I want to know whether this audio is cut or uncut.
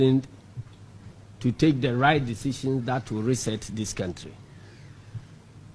cut